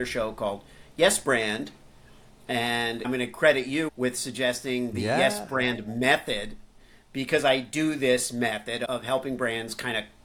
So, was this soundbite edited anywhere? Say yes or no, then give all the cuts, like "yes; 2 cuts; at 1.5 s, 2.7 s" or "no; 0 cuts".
yes; 2 cuts; at 3.0 s, 8.8 s